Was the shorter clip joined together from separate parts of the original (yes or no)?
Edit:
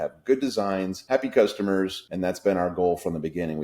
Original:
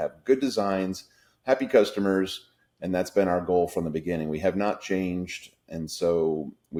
yes